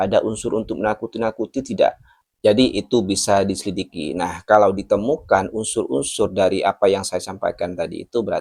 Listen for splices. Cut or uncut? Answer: uncut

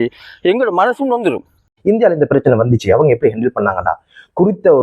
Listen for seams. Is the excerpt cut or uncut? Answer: cut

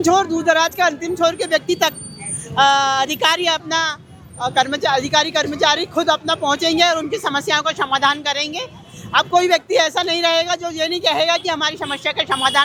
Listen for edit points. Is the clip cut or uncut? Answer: uncut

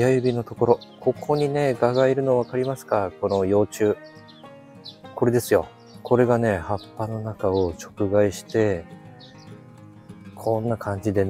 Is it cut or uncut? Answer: uncut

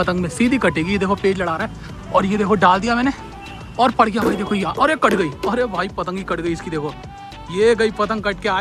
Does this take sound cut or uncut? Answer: uncut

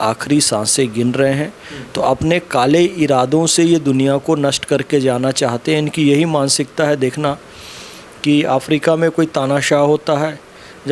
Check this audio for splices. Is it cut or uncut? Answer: uncut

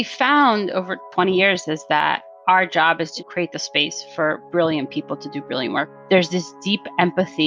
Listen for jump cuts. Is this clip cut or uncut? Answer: cut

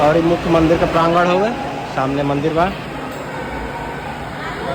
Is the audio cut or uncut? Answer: uncut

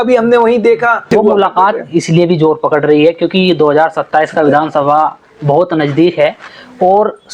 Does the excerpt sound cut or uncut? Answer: cut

